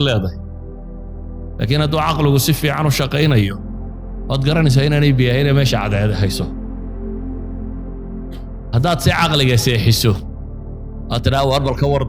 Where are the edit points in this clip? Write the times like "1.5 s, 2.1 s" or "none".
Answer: 6.7 s, 8.1 s